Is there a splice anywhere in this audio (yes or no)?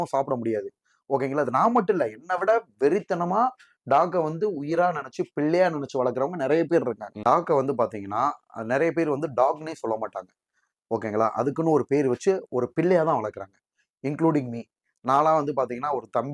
yes